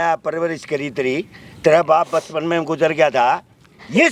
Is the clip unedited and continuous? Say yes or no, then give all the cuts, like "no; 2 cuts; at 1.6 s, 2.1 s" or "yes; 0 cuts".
yes; 0 cuts